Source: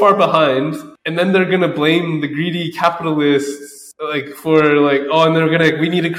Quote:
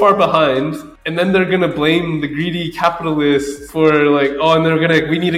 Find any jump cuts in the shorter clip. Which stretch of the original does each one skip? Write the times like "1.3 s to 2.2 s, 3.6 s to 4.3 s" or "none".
3.6 s to 4.3 s